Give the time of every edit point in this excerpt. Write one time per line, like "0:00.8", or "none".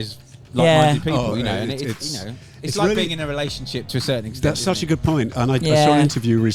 none

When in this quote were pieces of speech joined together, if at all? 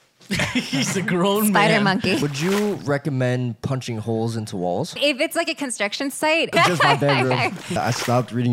0:02.2
0:05.0
0:06.5
0:07.8

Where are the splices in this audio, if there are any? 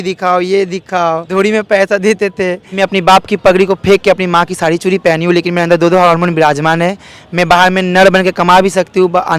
0:01.3
0:02.7

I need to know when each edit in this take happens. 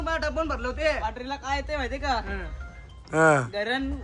none

